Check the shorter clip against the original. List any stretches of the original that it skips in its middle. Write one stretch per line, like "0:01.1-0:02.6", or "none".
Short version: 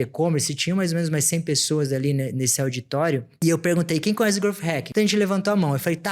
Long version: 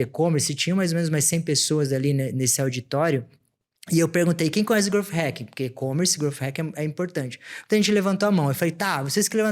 0:03.3-0:03.8
0:05.3-0:07.6